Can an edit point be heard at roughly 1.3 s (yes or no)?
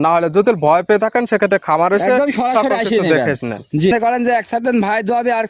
no